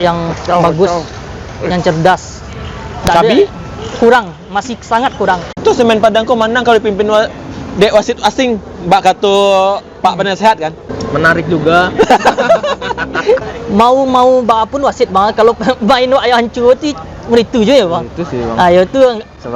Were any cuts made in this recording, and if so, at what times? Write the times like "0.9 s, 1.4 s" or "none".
5.6 s, 10.9 s, 13.5 s